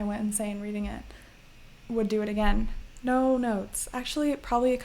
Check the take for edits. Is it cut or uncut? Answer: cut